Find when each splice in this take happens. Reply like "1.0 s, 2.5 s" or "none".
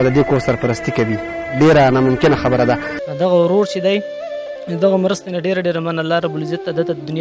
2.9 s